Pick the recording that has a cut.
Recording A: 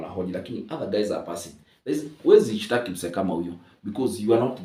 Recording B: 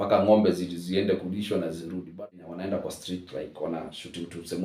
B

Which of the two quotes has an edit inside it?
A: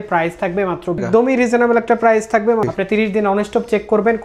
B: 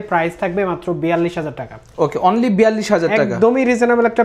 A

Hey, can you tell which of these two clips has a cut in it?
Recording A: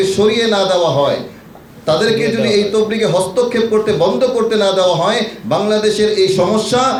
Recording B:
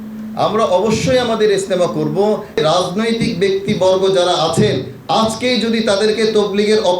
B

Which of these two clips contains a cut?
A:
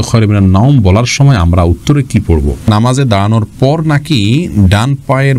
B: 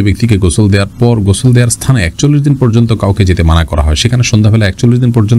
A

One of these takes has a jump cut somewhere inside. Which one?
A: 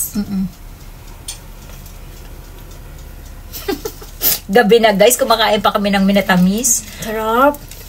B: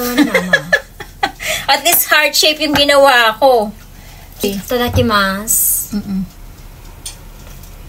B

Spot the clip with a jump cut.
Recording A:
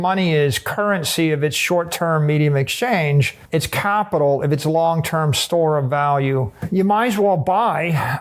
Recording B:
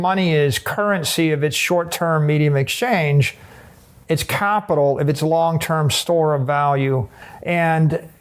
A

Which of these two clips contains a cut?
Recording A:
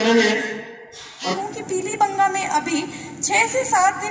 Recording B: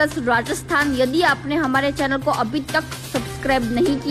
A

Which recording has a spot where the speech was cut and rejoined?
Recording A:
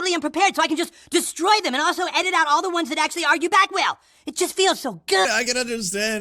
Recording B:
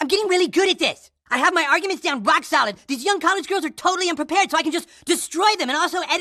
A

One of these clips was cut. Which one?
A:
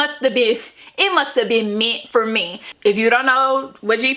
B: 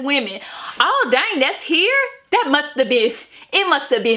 A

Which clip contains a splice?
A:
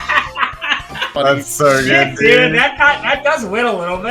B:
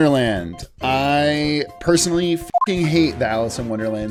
A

